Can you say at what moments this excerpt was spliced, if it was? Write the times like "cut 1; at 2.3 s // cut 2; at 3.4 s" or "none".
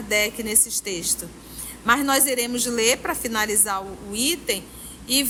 none